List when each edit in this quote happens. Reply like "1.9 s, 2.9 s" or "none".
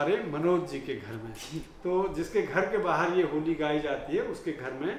none